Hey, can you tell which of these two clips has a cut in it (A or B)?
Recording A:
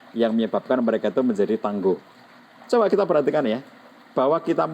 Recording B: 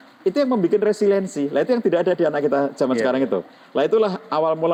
A